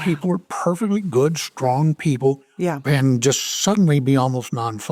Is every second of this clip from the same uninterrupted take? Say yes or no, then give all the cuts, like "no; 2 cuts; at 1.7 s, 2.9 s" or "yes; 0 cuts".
yes; 0 cuts